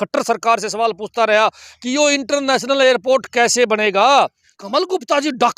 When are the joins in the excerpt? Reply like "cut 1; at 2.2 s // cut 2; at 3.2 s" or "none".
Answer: cut 1; at 4.5 s